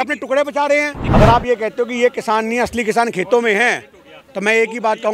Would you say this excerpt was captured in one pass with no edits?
no; 1 cut; at 1.0 s

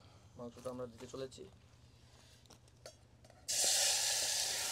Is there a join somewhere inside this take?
no; 0 cuts

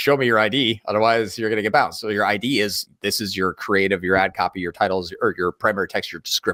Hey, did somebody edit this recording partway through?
no; 0 cuts

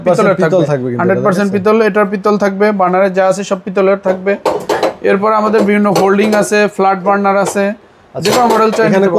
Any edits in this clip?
no; 0 cuts

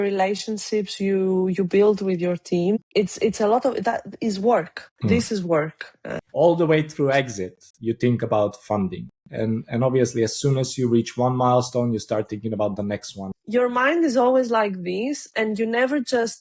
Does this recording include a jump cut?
yes; 2 cuts; at 6.2 s, 13.4 s

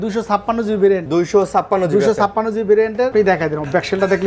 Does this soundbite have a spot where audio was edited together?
yes; 2 cuts; at 1.0 s, 3.1 s

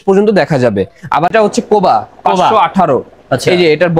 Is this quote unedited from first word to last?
no; 1 cut; at 1.3 s

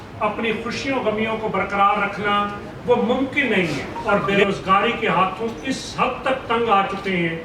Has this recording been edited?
yes; 1 cut; at 3.9 s

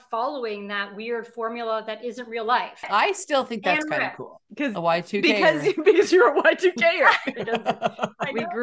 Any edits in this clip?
yes; 1 cut; at 2.9 s

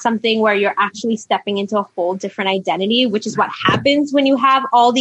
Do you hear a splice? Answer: no; 0 cuts

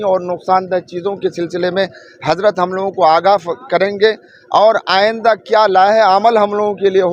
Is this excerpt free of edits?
yes; 0 cuts

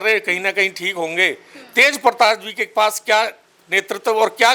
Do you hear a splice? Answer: no; 0 cuts

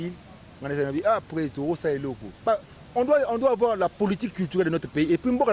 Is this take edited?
yes; 1 cut; at 2.4 s

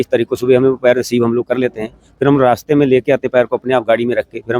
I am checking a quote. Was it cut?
no; 0 cuts

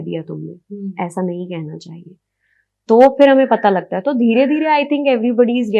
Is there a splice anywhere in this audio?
no; 0 cuts

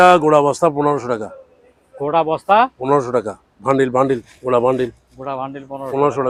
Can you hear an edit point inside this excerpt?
no; 0 cuts

